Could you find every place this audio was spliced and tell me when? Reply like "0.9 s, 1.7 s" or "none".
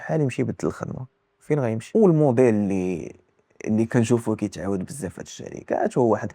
1.9 s